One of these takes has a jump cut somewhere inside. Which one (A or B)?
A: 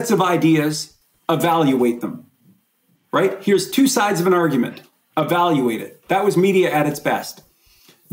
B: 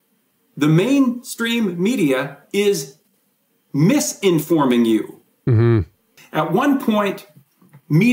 B